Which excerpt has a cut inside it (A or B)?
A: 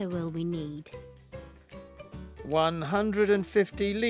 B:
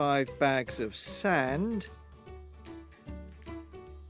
B